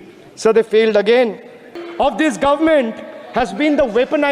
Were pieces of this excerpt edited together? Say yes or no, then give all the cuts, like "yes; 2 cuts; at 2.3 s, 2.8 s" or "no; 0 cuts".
yes; 1 cut; at 1.8 s